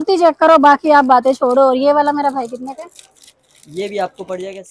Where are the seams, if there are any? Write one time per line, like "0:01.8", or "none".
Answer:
none